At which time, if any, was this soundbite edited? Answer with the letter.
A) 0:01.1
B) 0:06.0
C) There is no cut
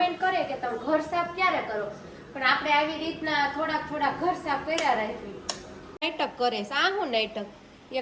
B